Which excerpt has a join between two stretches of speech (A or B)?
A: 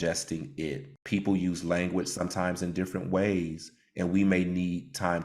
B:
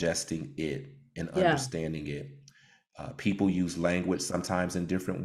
A